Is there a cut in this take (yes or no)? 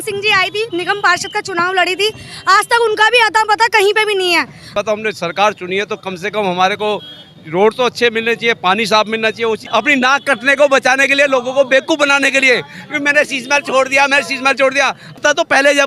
yes